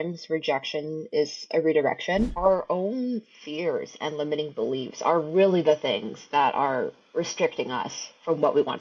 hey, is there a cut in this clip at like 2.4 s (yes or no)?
yes